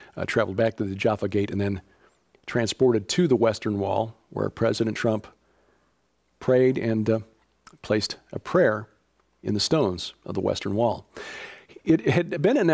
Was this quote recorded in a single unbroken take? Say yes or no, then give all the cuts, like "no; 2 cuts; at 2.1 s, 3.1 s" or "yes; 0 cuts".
no; 1 cut; at 4.4 s